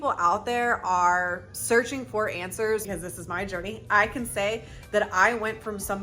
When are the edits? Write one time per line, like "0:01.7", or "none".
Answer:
0:02.9